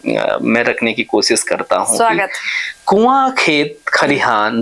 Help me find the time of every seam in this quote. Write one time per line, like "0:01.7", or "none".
none